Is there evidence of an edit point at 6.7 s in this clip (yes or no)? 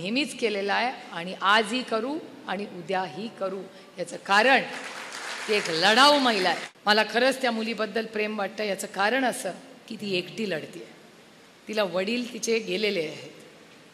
yes